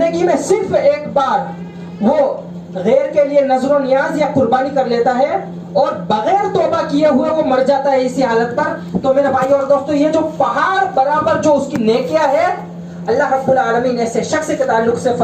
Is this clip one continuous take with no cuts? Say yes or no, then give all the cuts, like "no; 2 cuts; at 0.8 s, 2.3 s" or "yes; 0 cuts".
yes; 0 cuts